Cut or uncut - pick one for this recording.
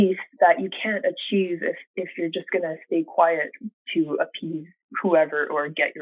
uncut